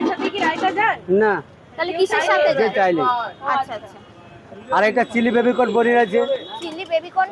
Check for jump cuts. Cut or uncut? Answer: uncut